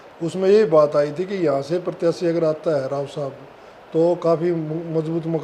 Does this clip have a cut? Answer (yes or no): no